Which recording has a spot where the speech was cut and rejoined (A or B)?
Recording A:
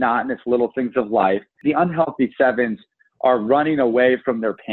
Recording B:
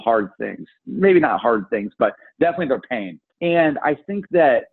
A